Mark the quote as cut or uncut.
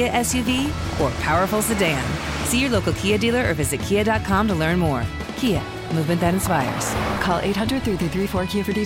uncut